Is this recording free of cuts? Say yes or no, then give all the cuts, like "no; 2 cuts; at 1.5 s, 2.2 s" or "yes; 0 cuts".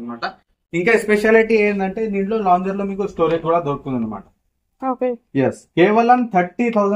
yes; 0 cuts